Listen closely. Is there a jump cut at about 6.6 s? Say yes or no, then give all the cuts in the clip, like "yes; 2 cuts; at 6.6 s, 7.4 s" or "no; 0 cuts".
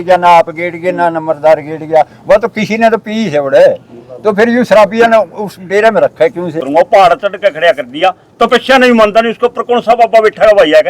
yes; 1 cut; at 6.6 s